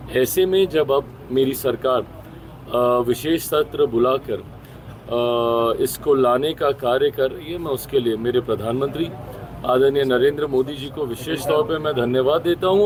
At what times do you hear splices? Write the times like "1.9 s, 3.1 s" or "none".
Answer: none